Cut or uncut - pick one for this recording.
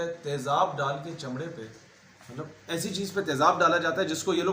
uncut